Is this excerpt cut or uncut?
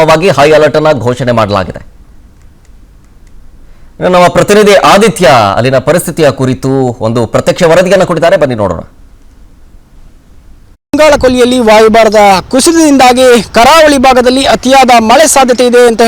cut